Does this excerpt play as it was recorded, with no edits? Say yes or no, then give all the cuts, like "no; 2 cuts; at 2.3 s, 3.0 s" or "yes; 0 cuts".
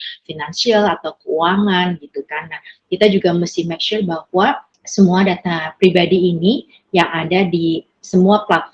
no; 1 cut; at 4.7 s